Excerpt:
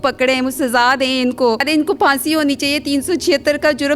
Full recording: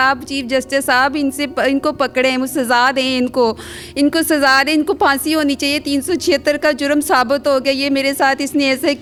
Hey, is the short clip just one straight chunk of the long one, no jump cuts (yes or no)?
no